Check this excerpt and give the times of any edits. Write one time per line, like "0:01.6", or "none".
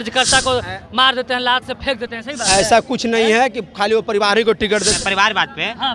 0:05.0